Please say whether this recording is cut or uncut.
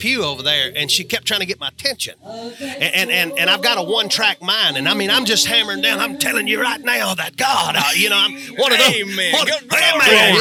uncut